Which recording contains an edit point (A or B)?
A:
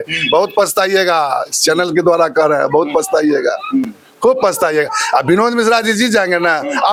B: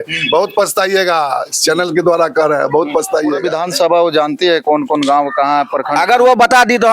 B